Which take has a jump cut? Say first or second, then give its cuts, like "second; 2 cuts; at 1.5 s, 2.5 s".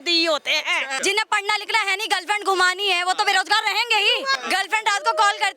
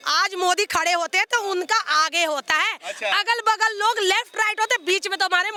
first; 2 cuts; at 0.9 s, 4.4 s